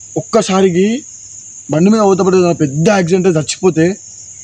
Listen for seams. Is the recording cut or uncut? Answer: uncut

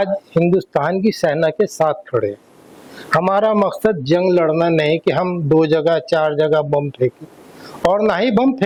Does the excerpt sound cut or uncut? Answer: uncut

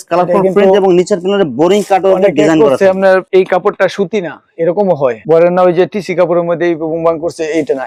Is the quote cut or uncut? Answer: uncut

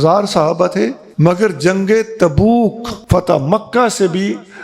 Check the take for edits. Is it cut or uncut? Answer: cut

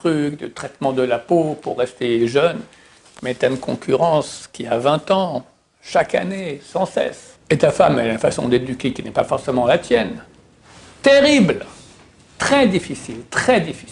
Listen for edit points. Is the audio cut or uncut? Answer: cut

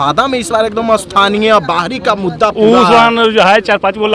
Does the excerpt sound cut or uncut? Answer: uncut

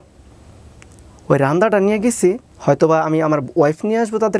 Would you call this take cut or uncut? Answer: cut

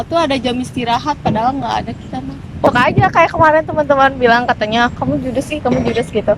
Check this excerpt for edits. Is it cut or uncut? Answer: cut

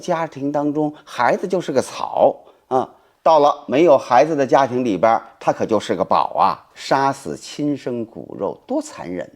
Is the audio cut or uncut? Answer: cut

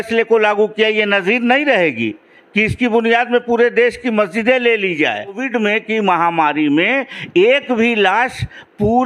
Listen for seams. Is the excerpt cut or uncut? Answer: cut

